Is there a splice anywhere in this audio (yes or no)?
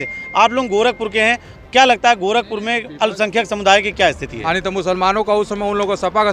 yes